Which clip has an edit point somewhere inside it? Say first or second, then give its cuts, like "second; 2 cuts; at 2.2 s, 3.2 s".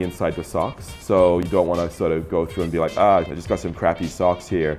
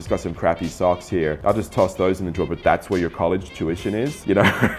first; 1 cut; at 0.9 s